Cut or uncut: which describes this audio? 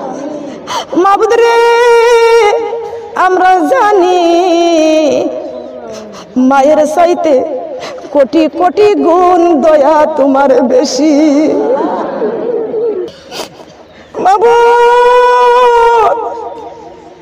cut